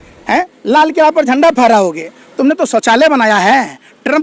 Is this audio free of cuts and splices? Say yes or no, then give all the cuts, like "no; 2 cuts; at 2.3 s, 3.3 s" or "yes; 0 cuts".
yes; 0 cuts